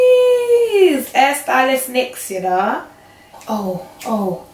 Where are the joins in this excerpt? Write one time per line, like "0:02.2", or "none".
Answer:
none